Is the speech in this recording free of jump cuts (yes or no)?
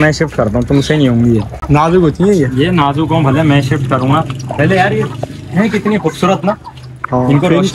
yes